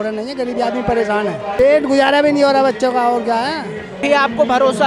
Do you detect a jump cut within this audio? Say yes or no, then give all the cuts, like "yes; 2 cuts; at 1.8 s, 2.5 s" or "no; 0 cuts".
yes; 2 cuts; at 1.6 s, 4.0 s